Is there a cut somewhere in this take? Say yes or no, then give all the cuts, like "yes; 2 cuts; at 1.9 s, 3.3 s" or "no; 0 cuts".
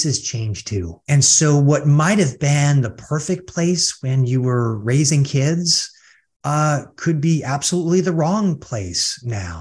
yes; 1 cut; at 1.0 s